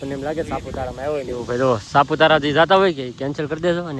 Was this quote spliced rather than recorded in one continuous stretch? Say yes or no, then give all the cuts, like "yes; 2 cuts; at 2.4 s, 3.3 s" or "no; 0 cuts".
no; 0 cuts